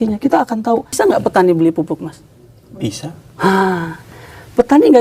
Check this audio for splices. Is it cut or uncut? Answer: cut